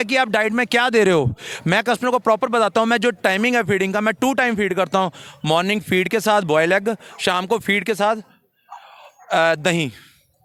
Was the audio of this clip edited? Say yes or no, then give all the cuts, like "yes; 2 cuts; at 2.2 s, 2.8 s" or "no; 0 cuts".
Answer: no; 0 cuts